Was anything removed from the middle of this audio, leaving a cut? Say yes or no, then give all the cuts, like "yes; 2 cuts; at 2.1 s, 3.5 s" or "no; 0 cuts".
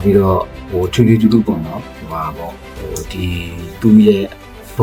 no; 0 cuts